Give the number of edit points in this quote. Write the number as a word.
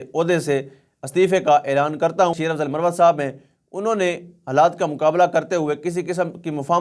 one